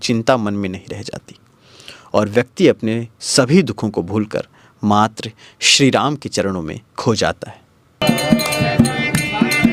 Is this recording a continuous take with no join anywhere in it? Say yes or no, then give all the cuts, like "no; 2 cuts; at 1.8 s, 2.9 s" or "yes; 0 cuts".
yes; 0 cuts